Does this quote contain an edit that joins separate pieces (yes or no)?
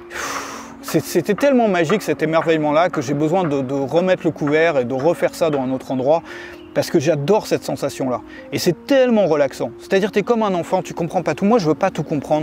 no